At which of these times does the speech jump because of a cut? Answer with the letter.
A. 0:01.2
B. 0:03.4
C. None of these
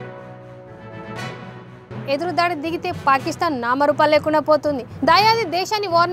A